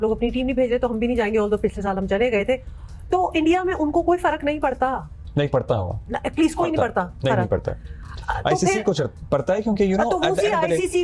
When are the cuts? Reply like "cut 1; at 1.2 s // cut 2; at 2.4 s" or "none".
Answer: none